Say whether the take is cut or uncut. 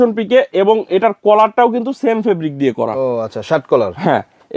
uncut